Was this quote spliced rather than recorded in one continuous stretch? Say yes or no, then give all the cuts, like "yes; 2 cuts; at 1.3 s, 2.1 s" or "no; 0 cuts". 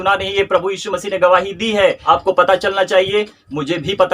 no; 0 cuts